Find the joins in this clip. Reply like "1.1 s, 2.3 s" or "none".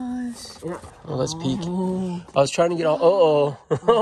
1.0 s